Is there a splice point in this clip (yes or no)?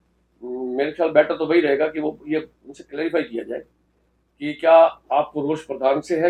no